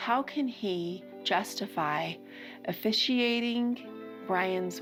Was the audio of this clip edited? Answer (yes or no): no